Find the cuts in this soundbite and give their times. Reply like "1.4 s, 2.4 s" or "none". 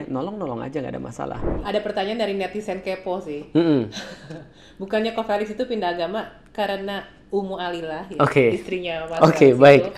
1.6 s

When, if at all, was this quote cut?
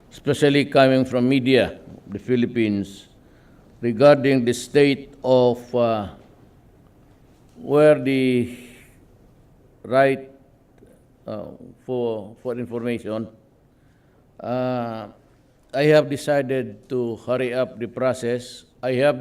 16.7 s

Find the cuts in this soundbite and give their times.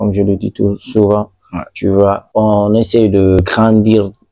2.2 s, 3.4 s

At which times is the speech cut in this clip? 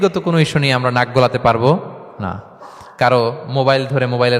none

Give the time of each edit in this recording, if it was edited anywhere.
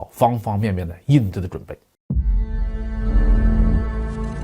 1.9 s

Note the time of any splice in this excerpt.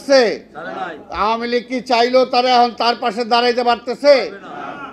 none

